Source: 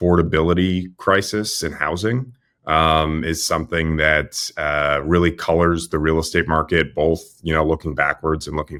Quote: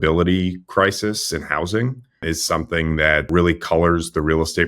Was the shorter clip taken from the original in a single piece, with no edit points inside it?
no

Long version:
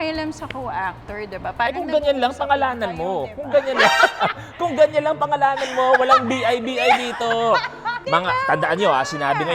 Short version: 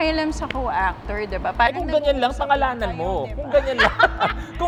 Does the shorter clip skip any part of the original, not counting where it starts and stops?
no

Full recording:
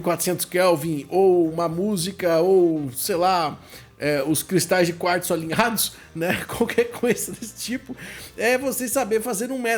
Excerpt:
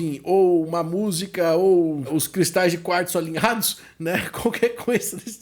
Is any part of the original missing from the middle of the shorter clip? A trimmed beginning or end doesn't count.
yes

